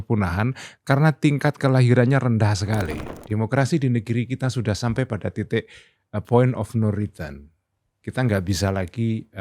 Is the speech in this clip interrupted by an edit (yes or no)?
yes